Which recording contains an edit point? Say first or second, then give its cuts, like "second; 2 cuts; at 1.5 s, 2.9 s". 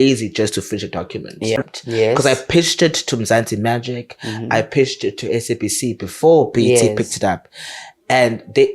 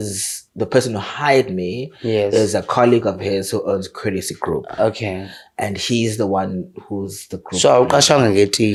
first; 1 cut; at 1.6 s